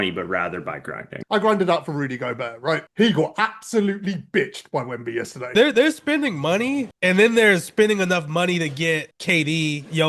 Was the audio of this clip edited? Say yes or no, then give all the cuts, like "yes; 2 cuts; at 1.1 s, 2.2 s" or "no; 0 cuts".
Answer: yes; 2 cuts; at 1.1 s, 5.5 s